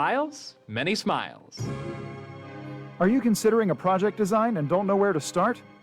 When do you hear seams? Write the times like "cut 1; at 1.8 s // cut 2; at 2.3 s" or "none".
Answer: cut 1; at 1.4 s